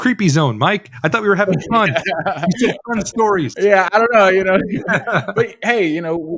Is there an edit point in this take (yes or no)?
no